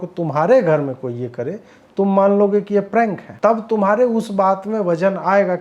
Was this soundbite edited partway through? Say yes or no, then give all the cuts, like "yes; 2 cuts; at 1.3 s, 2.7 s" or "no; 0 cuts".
yes; 1 cut; at 3.3 s